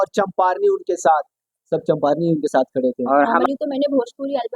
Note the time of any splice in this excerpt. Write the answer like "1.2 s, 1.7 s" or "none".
3.1 s